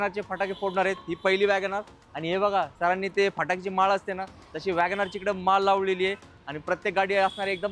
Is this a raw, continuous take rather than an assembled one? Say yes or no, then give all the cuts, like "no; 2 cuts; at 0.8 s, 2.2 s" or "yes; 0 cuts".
yes; 0 cuts